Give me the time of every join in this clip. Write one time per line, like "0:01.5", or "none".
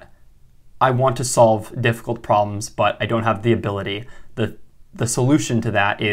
none